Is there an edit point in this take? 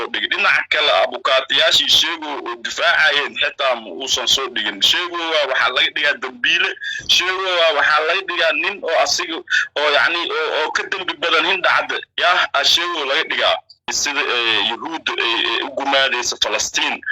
yes; 1 cut; at 14.0 s

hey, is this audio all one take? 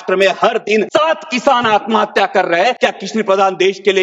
no; 2 cuts; at 0.9 s, 2.8 s

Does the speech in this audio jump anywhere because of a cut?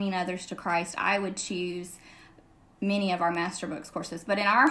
no; 0 cuts

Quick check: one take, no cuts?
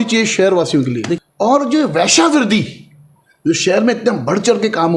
no; 1 cut; at 1.2 s

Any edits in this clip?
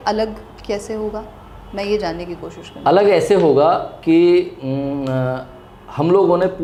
no; 0 cuts

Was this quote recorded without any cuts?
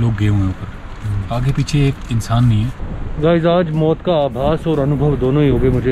no; 1 cut; at 2.7 s

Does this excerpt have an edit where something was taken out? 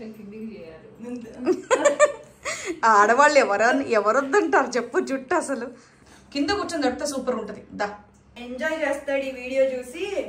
yes; 1 cut; at 6.0 s

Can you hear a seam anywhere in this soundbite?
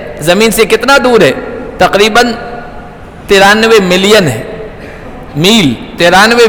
no; 0 cuts

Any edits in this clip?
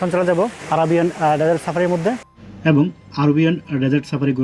no; 0 cuts

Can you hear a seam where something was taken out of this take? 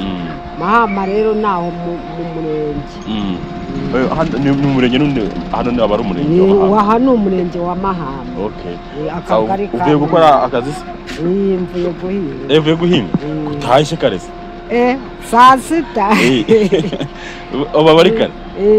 no; 0 cuts

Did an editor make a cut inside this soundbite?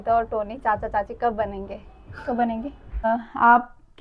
yes; 1 cut; at 3.1 s

